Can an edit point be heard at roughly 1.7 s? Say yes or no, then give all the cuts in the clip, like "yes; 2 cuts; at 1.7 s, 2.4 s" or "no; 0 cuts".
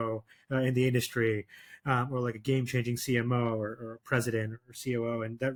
no; 0 cuts